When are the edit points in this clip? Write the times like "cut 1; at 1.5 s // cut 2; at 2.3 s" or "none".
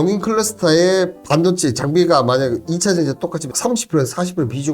cut 1; at 1.2 s